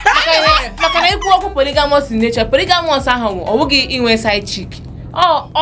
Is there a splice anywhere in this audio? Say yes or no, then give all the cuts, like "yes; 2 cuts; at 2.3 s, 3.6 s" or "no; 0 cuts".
no; 0 cuts